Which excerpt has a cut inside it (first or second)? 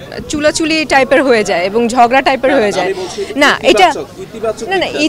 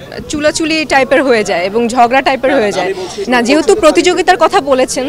second